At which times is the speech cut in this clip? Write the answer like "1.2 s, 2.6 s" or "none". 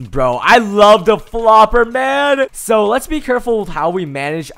2.6 s